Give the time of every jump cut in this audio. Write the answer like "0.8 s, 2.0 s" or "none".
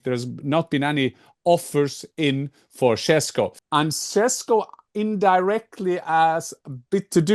3.6 s